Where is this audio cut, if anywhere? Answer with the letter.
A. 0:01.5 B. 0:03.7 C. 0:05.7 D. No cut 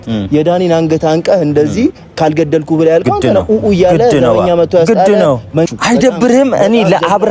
C